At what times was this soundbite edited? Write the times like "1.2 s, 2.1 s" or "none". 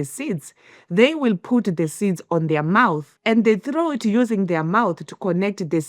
3.1 s